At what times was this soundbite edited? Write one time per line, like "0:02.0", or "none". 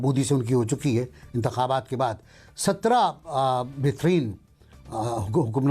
none